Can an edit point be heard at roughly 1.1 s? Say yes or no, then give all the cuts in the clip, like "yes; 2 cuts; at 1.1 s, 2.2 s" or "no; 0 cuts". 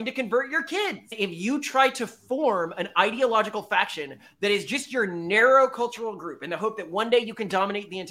yes; 1 cut; at 1.1 s